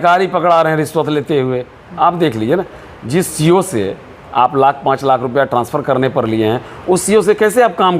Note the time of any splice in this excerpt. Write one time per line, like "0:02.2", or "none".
none